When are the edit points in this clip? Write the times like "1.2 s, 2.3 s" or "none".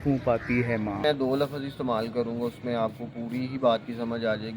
1.0 s